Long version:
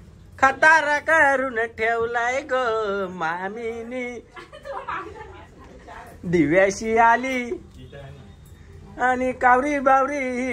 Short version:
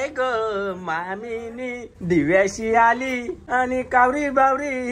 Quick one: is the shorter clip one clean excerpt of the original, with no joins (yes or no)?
no